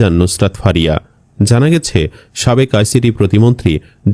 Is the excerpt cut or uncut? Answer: uncut